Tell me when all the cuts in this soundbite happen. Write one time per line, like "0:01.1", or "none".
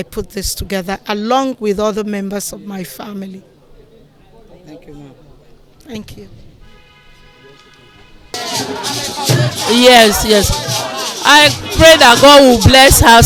none